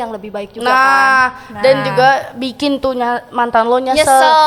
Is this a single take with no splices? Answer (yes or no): yes